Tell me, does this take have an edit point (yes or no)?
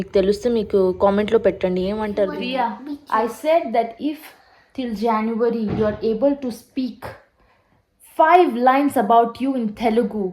yes